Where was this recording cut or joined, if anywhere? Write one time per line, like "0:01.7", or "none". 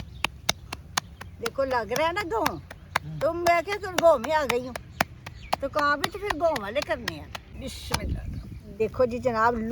0:07.5
0:08.7